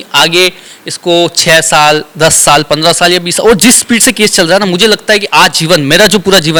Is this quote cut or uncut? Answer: uncut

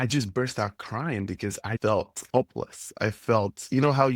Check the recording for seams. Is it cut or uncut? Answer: cut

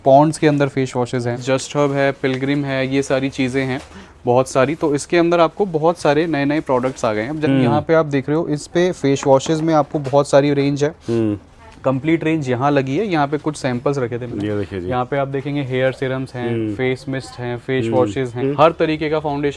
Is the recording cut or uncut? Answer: cut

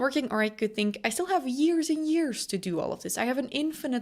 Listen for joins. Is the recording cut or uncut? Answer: uncut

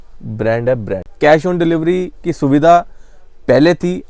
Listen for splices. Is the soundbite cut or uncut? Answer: cut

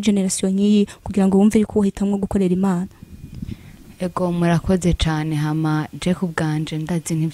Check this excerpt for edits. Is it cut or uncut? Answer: uncut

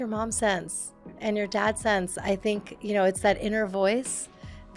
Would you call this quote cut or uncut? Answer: cut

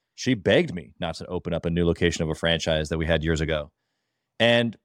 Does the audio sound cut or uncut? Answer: uncut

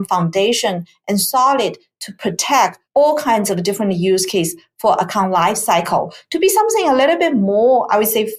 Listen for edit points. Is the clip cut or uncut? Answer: uncut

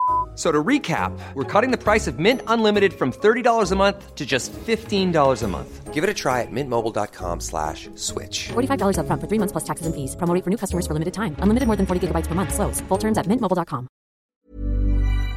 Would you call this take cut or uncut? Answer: cut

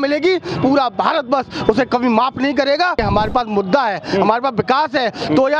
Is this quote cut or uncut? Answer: cut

